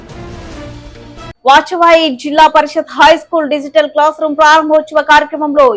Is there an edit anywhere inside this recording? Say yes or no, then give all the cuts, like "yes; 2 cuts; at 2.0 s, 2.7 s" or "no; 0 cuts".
yes; 1 cut; at 0.9 s